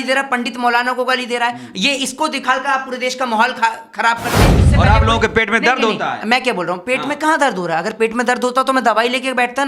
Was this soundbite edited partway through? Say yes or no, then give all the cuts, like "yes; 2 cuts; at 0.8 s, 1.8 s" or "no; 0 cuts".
yes; 1 cut; at 4.6 s